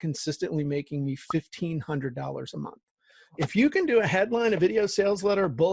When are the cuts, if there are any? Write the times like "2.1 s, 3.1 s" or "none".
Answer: 3.4 s